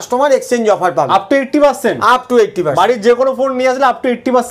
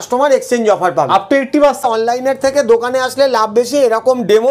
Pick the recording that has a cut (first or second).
second